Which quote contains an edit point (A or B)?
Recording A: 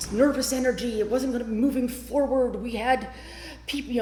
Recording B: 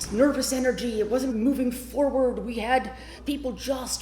B